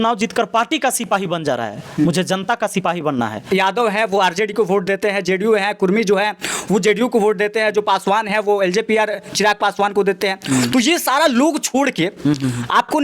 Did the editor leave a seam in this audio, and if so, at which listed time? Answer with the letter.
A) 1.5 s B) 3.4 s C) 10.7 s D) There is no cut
B